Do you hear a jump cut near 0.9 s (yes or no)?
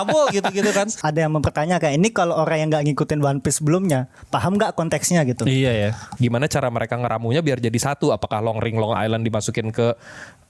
yes